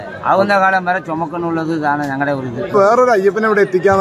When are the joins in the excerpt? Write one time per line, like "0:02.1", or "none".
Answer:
0:02.7